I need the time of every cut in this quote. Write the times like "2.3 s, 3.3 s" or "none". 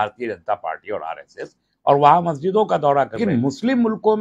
3.2 s